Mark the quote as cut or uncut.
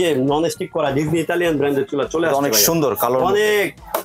uncut